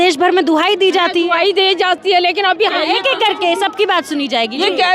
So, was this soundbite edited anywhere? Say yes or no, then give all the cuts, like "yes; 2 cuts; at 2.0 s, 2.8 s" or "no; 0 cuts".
yes; 1 cut; at 2.6 s